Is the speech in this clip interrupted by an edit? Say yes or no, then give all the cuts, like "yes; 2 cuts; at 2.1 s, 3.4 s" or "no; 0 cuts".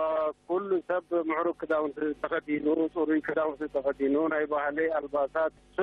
no; 0 cuts